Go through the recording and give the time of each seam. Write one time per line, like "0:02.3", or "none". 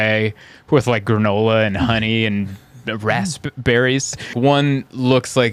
0:04.3